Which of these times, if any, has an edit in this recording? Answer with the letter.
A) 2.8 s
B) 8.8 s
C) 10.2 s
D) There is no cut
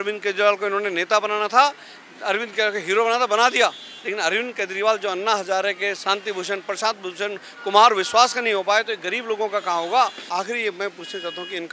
C